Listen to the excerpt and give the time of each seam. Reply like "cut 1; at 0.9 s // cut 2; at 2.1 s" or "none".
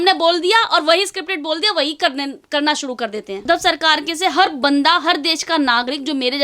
cut 1; at 3.4 s

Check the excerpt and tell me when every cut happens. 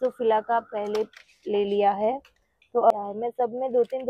cut 1; at 2.9 s

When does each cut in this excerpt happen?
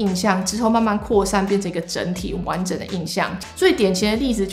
cut 1; at 3.4 s

